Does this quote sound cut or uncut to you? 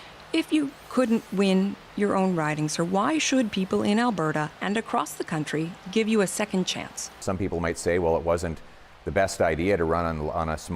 cut